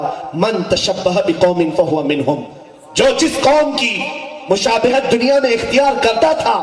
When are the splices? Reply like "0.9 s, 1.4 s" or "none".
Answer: none